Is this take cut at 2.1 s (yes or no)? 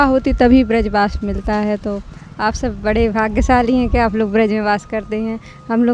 no